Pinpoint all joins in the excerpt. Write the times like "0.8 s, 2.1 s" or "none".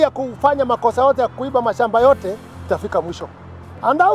2.0 s

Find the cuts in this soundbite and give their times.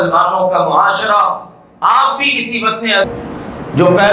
3.0 s

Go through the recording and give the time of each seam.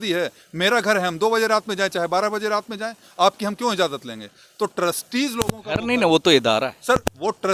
none

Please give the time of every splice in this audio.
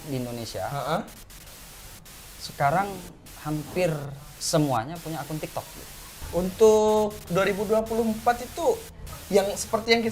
6.2 s

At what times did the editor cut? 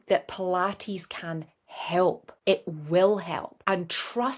2.3 s, 3.5 s

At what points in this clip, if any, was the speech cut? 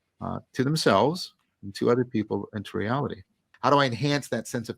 3.4 s

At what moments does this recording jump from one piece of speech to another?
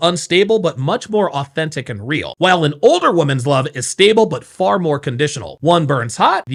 none

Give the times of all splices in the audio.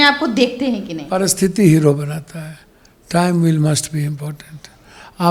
none

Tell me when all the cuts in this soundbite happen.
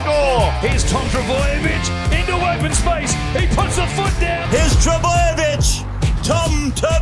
4.4 s

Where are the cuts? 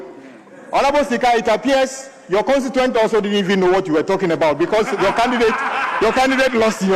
none

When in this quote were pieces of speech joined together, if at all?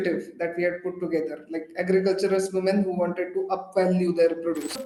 none

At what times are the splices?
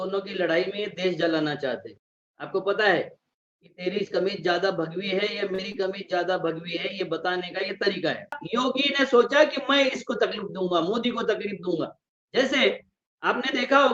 8.4 s

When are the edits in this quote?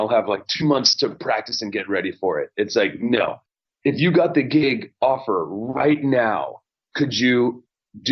none

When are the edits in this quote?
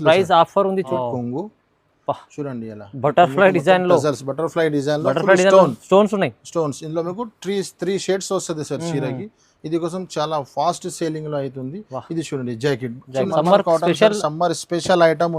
0.9 s, 13.3 s

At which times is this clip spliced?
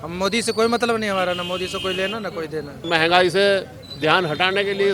2.8 s

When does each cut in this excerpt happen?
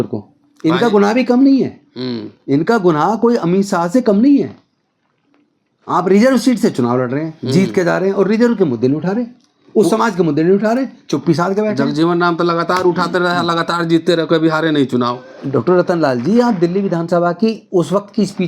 none

